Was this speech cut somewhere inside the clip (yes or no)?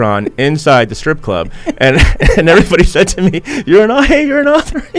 no